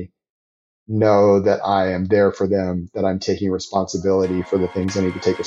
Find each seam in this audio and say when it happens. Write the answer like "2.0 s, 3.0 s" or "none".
none